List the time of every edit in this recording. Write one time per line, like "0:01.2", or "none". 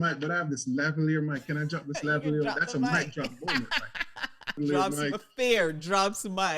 0:04.6